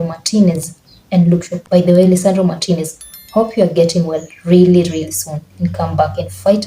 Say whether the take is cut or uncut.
cut